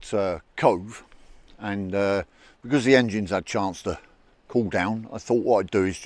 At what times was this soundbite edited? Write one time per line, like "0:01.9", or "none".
none